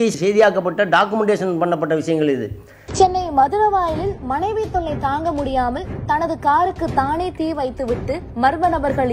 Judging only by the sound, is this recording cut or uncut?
uncut